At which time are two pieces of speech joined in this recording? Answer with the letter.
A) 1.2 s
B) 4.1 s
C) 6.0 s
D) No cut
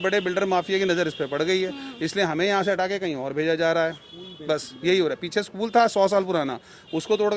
D